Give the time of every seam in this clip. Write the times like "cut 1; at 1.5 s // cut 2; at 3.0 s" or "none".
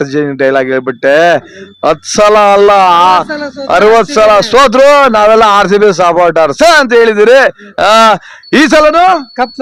none